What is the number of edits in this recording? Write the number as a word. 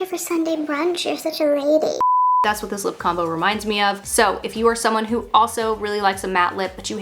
zero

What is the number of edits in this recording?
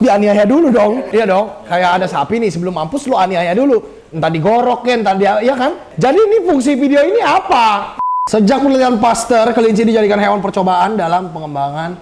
one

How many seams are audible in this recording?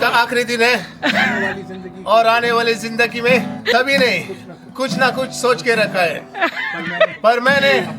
one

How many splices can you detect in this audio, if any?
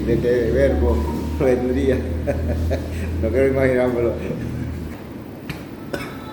one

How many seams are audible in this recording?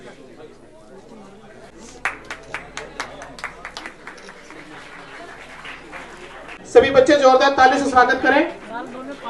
two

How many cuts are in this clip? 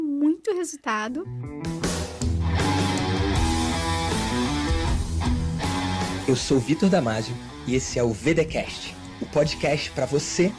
one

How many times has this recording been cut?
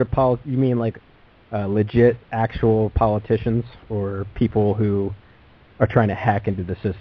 one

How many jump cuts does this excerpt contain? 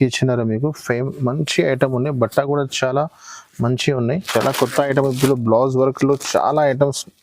one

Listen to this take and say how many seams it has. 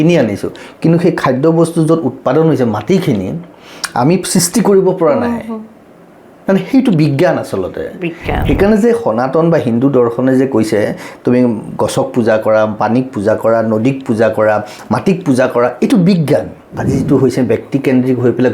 one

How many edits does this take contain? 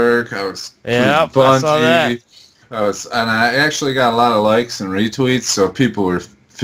zero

